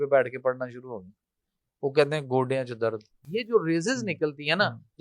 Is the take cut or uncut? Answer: cut